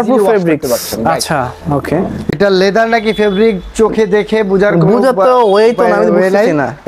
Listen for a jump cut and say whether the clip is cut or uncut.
cut